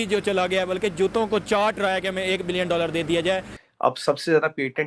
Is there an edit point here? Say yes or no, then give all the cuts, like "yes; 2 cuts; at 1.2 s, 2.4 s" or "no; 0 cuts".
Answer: yes; 1 cut; at 3.6 s